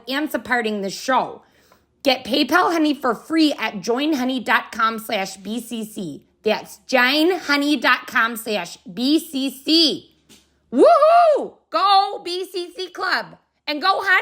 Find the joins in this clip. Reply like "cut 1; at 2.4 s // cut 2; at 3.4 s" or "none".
none